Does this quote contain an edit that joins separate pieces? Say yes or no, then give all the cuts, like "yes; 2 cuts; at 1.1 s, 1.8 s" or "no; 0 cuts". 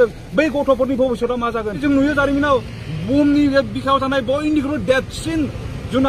yes; 1 cut; at 1.8 s